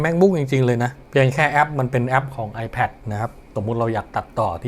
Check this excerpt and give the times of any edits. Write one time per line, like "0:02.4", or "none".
0:01.0
0:03.5

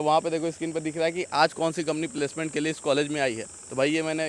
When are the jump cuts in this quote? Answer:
none

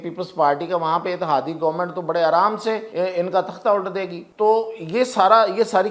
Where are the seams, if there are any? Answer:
0:02.9
0:04.2

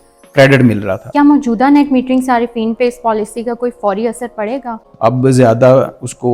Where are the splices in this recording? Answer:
0:01.1
0:04.8

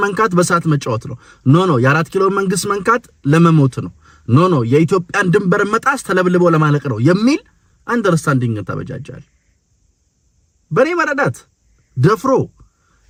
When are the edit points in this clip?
none

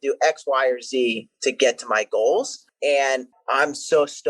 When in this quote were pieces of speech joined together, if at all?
0:02.6
0:03.3

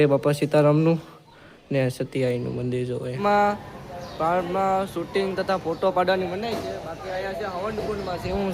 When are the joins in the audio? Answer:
0:03.2

